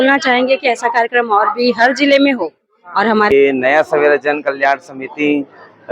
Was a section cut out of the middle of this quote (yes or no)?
yes